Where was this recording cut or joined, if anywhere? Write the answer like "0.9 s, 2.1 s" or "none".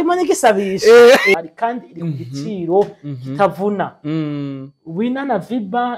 1.3 s